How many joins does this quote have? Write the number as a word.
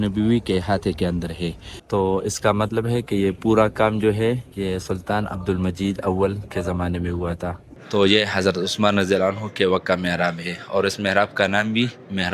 two